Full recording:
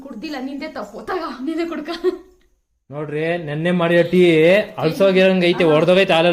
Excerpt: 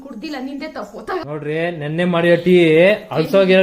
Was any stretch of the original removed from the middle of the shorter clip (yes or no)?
yes